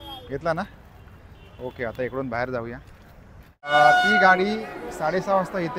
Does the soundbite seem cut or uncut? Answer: cut